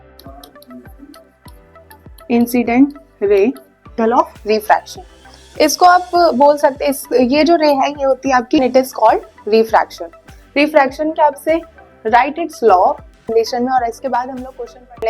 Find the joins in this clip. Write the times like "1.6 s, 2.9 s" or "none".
4.0 s, 8.6 s, 13.3 s